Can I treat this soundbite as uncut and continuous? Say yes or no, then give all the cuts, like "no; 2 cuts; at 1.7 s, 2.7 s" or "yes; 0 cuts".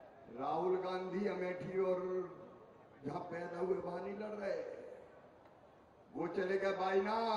yes; 0 cuts